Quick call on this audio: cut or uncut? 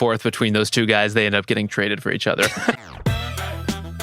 cut